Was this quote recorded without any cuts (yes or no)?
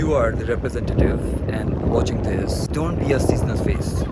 no